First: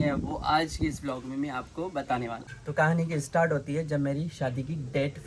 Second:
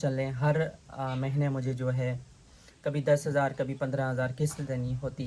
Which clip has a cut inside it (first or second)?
first